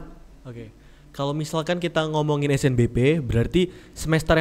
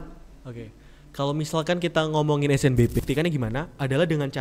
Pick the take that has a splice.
second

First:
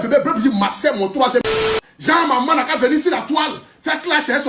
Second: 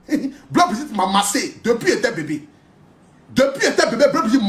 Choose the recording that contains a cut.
first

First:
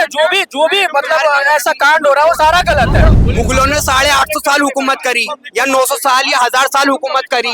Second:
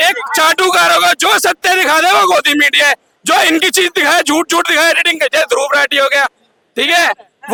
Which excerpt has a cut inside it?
first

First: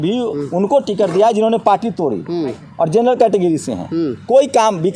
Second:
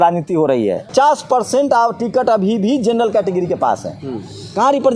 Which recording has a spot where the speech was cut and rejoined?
second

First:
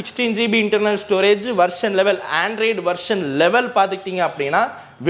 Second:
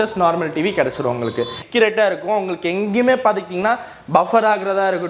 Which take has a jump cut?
second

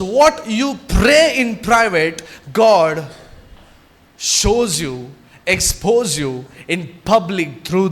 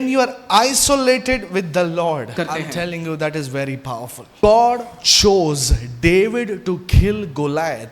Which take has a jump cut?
second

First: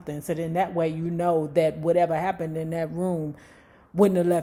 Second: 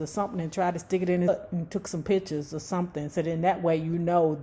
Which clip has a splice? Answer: second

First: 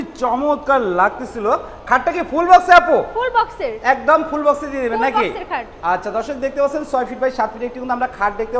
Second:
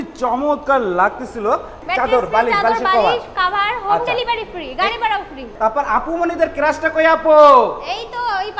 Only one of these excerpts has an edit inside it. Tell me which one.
second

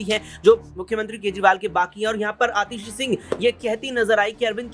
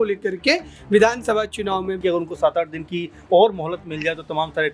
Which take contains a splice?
second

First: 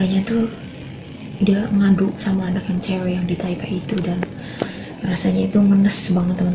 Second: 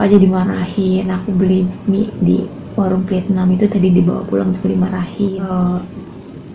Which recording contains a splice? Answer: second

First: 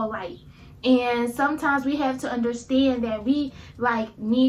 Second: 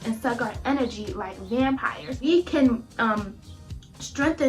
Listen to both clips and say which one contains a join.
second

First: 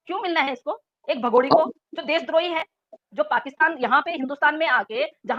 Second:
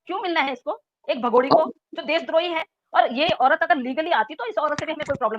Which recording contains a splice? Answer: second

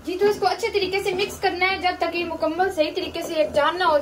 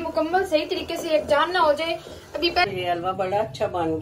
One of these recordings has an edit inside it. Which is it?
second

